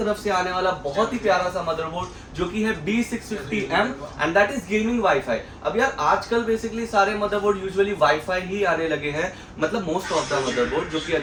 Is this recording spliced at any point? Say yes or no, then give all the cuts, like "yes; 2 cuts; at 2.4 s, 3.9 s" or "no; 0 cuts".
no; 0 cuts